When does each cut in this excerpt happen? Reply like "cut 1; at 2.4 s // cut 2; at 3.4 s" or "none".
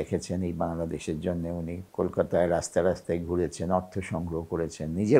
cut 1; at 1.8 s